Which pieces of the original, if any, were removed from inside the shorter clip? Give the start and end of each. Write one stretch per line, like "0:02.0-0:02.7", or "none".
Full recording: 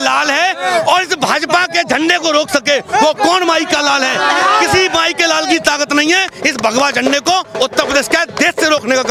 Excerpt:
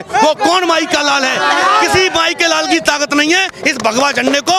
none

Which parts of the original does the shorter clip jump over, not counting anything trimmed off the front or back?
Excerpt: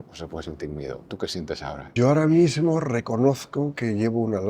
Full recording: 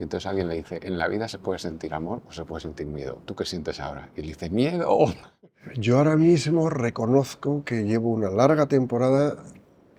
0:03.9-0:05.6

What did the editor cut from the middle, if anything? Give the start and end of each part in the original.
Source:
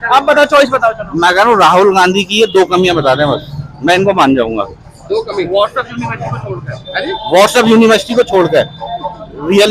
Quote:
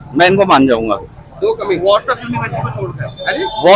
none

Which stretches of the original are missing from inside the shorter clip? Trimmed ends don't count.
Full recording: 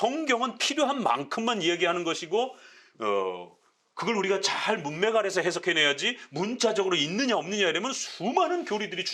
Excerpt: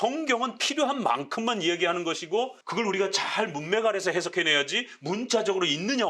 0:02.6-0:03.9

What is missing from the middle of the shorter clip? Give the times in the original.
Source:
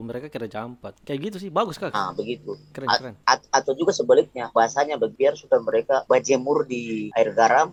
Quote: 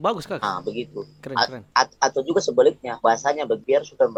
none

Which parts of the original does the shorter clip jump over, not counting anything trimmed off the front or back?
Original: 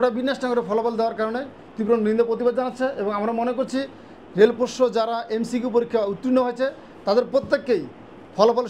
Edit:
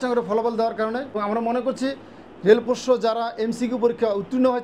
0:01.5-0:03.1

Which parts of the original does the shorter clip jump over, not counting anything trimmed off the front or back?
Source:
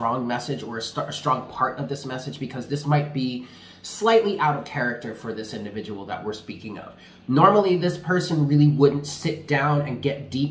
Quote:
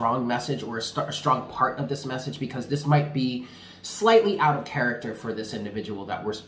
none

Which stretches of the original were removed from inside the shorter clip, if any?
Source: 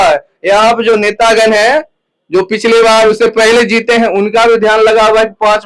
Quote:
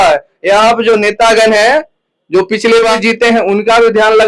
0:03.0-0:03.6

